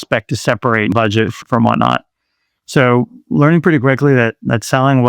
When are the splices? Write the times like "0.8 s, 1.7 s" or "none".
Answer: 0.9 s